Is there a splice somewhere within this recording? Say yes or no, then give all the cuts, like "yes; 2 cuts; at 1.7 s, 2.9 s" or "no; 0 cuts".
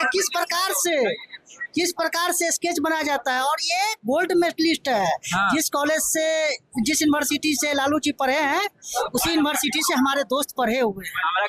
no; 0 cuts